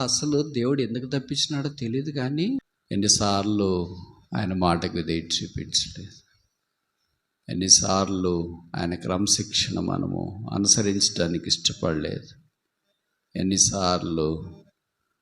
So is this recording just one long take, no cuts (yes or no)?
no